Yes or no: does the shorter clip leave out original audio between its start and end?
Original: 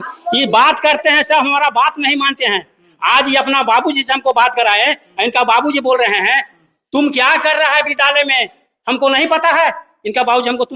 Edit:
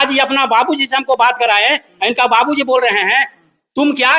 no